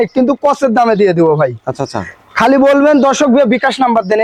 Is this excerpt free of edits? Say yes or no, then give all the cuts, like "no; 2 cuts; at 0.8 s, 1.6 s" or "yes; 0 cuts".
yes; 0 cuts